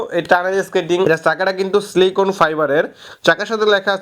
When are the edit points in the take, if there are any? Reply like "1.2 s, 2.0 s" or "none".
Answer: 1.1 s